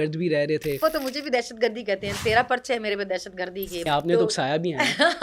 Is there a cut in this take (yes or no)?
yes